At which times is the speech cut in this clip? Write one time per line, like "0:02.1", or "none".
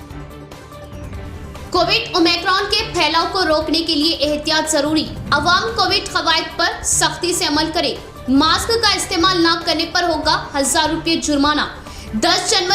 0:01.2

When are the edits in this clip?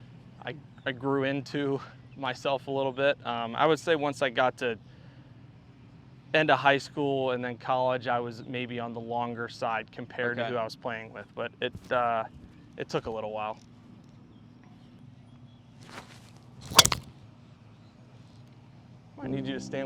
0:15.0

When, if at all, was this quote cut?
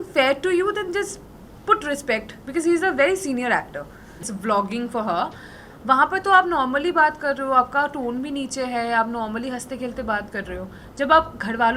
0:04.1

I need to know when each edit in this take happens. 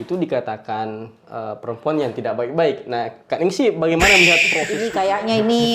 0:04.6

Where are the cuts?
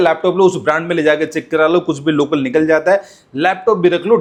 none

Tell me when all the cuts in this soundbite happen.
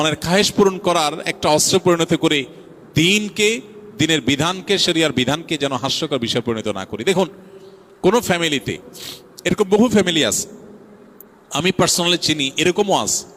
none

